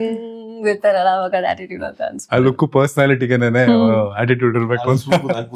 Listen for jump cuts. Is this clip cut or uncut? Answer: uncut